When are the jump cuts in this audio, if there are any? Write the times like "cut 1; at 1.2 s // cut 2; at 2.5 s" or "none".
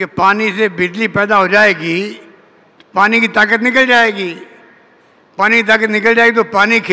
none